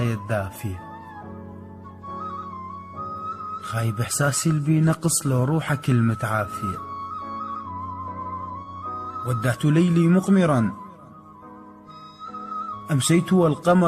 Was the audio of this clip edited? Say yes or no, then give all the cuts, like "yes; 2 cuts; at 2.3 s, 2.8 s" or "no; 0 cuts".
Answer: no; 0 cuts